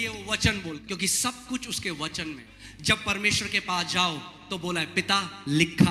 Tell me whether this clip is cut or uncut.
cut